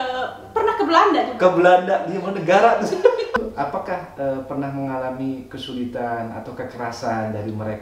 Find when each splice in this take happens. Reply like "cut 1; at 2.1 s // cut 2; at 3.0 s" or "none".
cut 1; at 3.4 s